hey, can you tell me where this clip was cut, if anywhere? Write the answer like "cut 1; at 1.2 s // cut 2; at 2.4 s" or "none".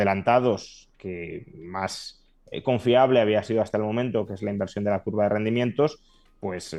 none